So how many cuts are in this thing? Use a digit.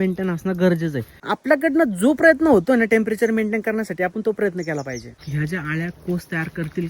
2